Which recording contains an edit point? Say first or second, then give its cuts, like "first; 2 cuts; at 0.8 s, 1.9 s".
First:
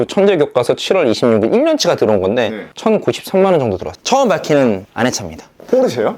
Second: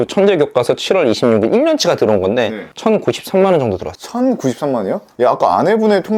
first; 1 cut; at 3.9 s